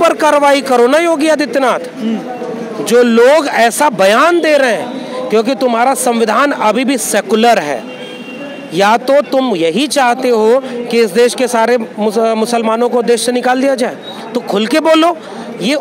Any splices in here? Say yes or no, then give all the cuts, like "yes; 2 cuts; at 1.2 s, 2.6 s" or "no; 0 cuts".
no; 0 cuts